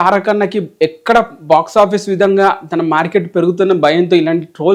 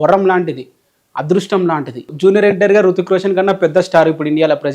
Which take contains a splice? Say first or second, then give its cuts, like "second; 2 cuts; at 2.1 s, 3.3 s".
second; 1 cut; at 2.1 s